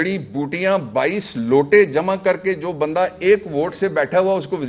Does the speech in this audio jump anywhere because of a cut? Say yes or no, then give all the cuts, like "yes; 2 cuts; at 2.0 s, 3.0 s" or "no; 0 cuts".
no; 0 cuts